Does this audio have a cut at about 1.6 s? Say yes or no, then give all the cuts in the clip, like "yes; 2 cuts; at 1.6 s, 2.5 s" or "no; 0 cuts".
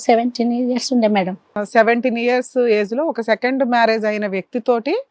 yes; 1 cut; at 1.6 s